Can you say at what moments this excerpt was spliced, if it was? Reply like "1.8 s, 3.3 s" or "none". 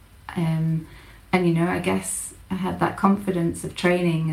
none